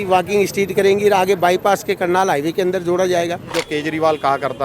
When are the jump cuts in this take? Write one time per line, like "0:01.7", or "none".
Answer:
0:03.5